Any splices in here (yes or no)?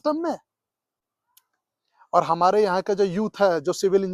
no